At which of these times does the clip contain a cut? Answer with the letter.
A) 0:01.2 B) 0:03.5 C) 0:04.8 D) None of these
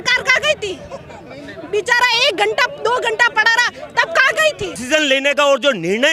C